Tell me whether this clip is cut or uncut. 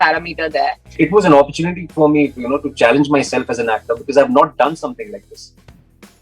cut